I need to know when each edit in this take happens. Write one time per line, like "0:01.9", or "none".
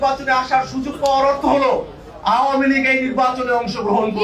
none

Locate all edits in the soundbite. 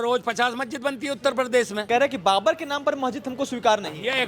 0:01.8

